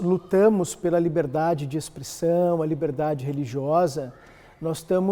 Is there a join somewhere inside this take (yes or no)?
no